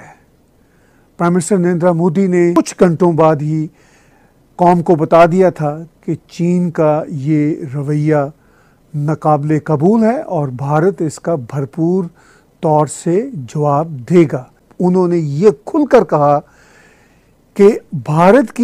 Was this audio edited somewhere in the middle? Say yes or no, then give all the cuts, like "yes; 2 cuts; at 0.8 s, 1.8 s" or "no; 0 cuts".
yes; 2 cuts; at 2.6 s, 14.6 s